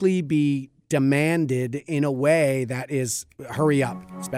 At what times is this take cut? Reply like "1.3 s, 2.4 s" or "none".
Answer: none